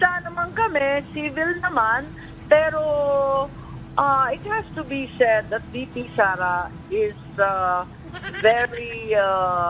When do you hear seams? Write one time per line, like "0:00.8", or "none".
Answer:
none